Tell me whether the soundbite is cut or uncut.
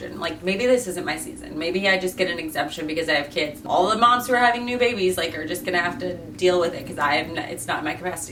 uncut